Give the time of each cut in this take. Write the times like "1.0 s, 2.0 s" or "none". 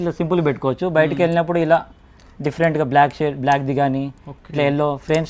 none